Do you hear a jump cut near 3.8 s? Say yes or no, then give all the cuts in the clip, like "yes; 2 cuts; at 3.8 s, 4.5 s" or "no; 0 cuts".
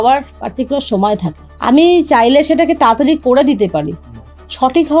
no; 1 cut; at 1.5 s